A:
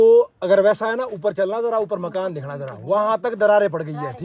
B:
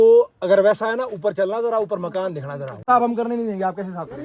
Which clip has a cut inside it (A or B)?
B